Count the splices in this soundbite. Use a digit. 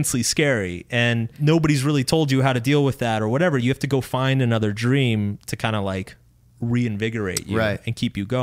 1